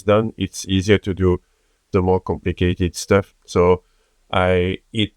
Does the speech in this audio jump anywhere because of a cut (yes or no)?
yes